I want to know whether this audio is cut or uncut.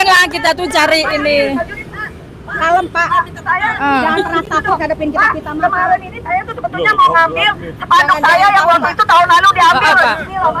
uncut